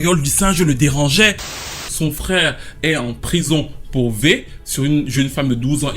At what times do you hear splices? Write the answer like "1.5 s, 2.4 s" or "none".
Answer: 1.6 s